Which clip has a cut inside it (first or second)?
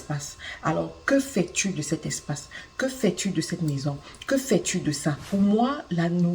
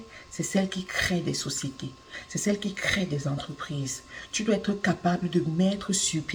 first